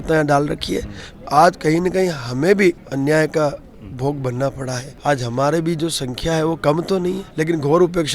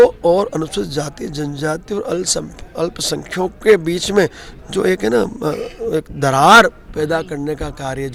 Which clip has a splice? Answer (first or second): first